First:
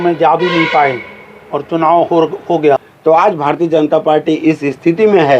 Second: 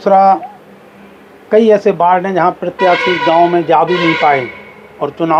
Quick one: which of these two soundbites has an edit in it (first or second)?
first